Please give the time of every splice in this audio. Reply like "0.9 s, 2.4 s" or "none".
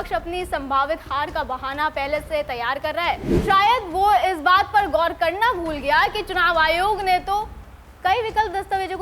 3.3 s